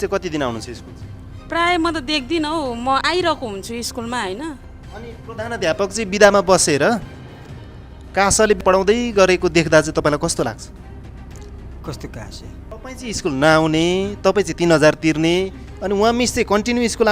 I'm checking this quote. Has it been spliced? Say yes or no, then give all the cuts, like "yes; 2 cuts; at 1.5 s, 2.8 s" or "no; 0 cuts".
yes; 2 cuts; at 4.6 s, 12.7 s